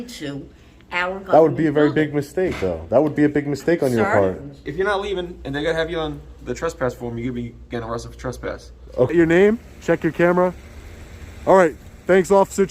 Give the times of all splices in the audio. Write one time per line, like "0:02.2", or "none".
0:04.7
0:09.1